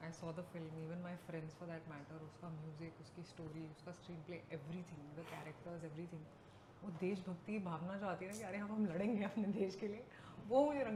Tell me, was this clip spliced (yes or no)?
no